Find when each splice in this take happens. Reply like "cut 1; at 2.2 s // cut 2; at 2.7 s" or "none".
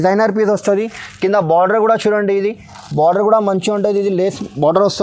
none